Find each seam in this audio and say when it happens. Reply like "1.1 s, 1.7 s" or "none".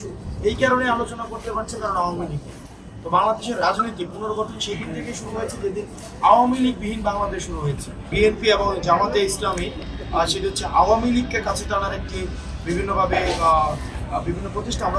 8.1 s